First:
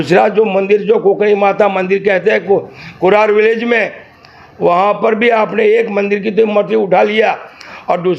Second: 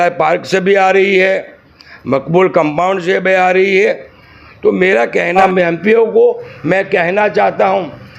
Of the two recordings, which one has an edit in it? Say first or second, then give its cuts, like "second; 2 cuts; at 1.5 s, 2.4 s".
second; 1 cut; at 5.4 s